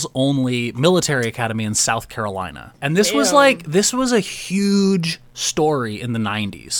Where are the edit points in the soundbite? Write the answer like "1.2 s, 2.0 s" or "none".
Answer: 2.7 s